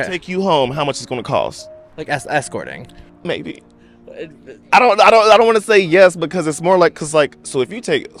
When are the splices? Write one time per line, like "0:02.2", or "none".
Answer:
none